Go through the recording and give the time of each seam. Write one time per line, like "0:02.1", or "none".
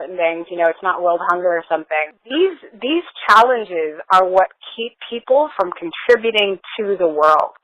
0:02.2